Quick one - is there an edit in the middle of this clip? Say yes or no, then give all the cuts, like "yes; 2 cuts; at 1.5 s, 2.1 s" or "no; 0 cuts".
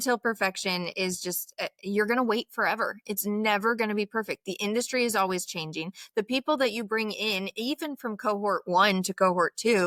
no; 0 cuts